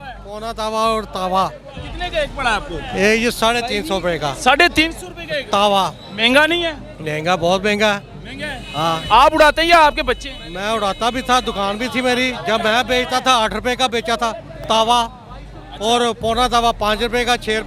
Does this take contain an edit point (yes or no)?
no